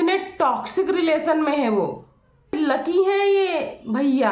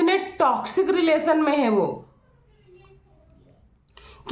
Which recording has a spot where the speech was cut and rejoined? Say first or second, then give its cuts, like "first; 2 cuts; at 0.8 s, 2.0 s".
first; 1 cut; at 2.6 s